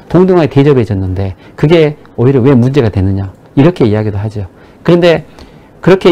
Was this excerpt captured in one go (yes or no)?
yes